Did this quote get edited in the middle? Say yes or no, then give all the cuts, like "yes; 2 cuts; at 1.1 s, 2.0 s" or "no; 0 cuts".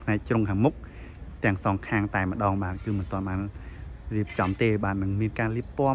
no; 0 cuts